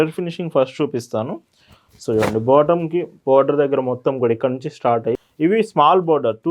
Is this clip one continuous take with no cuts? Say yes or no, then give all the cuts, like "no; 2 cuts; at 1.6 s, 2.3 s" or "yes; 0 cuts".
no; 1 cut; at 5.1 s